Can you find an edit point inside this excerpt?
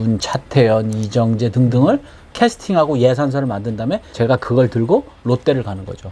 no; 0 cuts

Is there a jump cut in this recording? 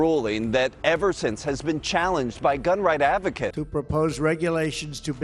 yes; 1 cut; at 3.5 s

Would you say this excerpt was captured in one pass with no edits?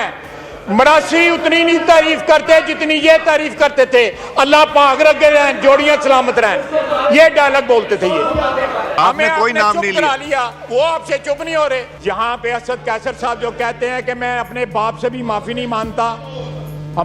no; 2 cuts; at 9.0 s, 11.9 s

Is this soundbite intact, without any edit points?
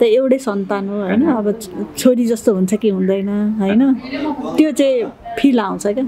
yes; 0 cuts

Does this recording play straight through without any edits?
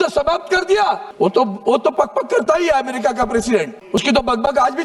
no; 2 cuts; at 1.1 s, 3.8 s

